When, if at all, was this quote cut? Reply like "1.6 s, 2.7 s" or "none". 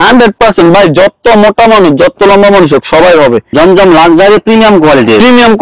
3.5 s

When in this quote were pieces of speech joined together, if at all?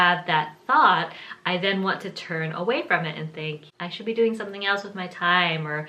none

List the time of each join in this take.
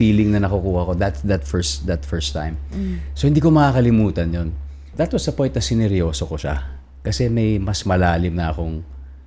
4.9 s

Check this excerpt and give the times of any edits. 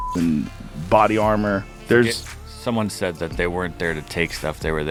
none

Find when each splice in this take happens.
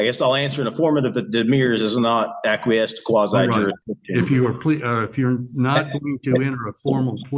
none

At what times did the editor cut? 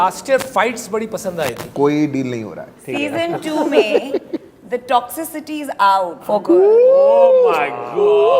1.6 s, 2.9 s, 6.2 s

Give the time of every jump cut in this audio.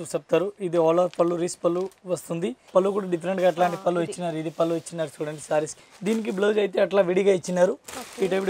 2.6 s, 5.7 s

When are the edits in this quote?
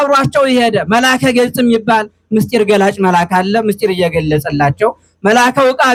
none

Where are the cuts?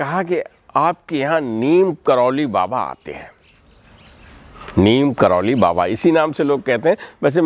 none

